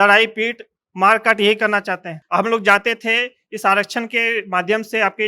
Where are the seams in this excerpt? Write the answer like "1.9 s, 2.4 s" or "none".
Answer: 2.1 s